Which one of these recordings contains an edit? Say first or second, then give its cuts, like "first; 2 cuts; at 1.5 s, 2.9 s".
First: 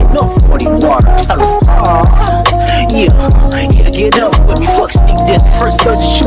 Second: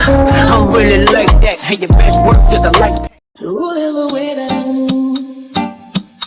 second; 1 cut; at 3.0 s